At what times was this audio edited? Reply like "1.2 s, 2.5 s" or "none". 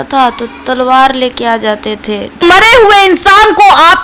2.4 s